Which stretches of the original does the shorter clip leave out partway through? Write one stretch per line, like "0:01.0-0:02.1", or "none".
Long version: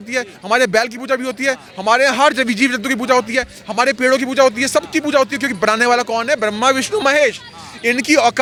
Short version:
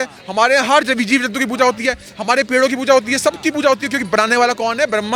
none